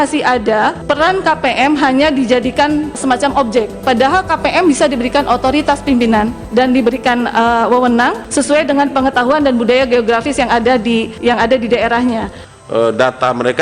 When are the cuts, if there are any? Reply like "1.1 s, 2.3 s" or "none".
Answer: 0.8 s, 3.0 s, 6.4 s, 8.2 s, 11.1 s, 12.4 s